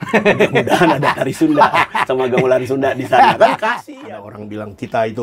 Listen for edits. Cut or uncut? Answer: cut